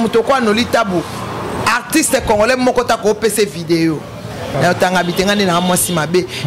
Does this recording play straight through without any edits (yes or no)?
no